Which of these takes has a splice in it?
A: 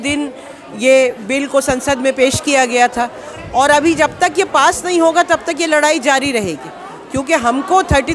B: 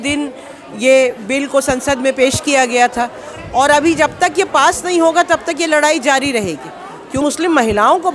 B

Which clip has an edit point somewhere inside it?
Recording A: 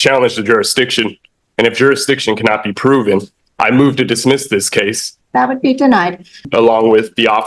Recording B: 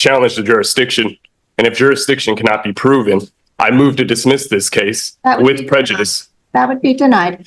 A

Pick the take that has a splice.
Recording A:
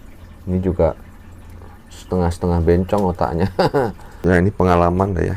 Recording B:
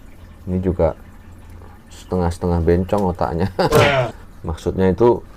A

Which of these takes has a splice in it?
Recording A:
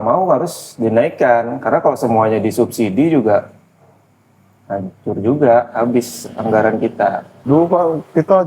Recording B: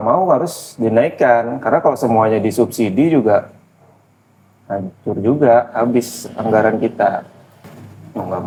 A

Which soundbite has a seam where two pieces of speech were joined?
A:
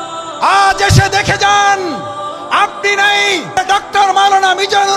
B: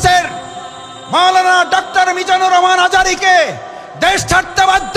A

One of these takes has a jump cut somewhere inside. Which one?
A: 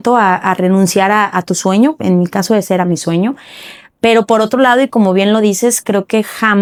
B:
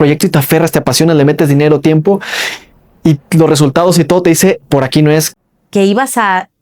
B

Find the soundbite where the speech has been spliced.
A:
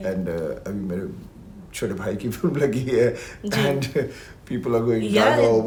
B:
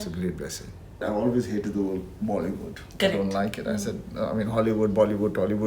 B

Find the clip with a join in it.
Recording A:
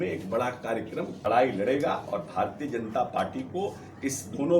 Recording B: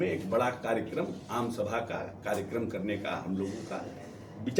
A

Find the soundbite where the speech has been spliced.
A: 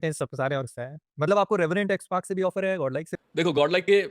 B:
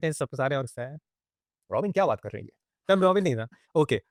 A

